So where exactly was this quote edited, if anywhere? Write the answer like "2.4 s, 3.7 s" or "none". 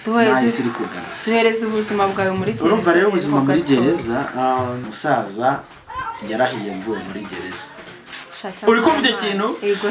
4.8 s